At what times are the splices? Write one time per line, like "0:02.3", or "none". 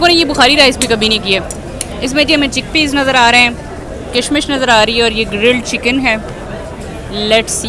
none